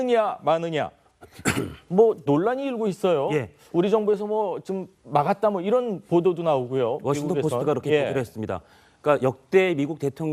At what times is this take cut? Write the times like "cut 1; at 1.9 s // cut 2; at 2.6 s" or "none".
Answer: cut 1; at 4.2 s